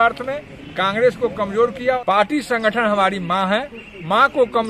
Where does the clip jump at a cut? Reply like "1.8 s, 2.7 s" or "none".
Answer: 2.0 s